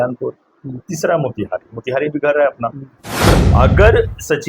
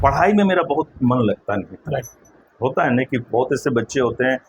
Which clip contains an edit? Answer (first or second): first